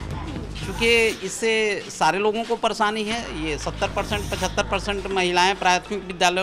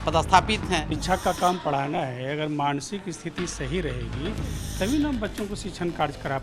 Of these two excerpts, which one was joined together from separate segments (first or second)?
second